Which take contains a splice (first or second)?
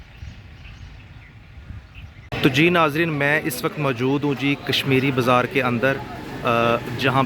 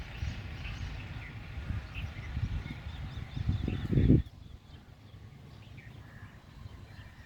first